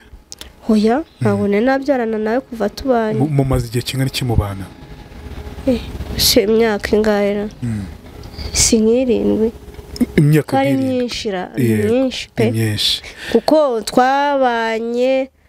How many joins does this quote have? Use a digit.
0